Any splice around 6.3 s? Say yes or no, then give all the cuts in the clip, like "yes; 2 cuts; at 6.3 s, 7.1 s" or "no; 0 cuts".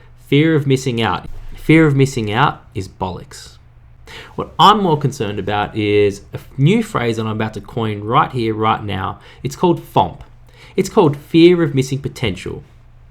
no; 2 cuts; at 1.2 s, 3.9 s